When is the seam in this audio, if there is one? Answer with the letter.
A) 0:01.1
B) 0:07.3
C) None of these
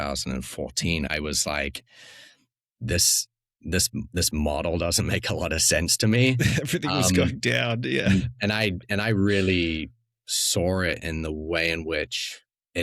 A